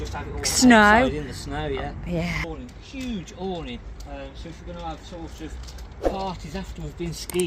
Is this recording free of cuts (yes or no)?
no